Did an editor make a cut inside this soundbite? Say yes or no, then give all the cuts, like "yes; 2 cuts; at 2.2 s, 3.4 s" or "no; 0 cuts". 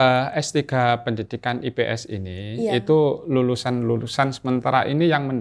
no; 0 cuts